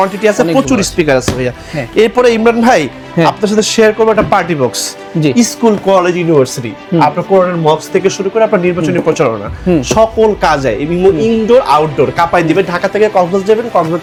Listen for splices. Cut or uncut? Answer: uncut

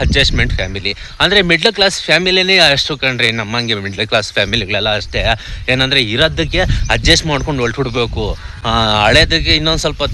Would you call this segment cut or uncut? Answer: uncut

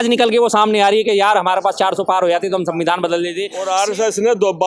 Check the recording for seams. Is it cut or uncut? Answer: cut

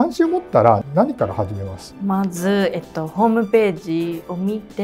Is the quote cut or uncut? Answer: uncut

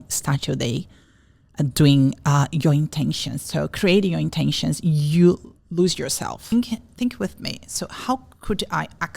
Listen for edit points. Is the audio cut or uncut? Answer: cut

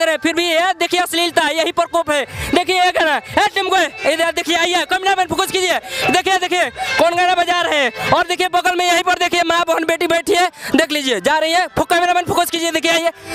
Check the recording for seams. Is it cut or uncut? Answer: uncut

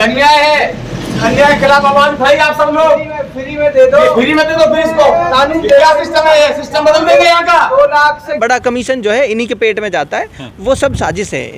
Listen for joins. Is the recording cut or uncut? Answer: cut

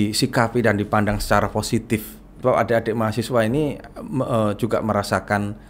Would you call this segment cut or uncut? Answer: cut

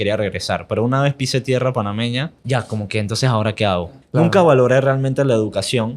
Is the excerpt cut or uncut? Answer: cut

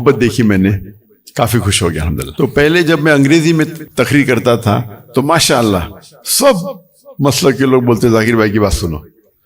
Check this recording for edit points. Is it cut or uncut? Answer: cut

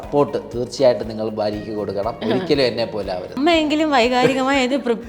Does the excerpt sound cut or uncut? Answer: cut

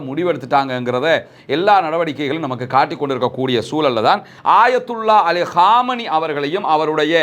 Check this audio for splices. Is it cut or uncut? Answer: cut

